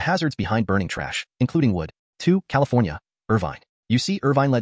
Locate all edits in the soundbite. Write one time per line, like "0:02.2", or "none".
0:02.0